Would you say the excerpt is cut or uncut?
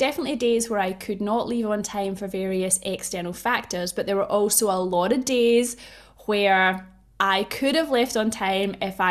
uncut